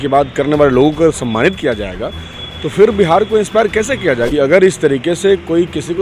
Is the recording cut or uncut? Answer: cut